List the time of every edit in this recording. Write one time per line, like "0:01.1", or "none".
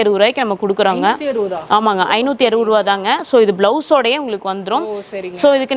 none